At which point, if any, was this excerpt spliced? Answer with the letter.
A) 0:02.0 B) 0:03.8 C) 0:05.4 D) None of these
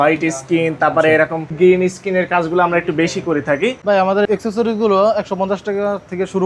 B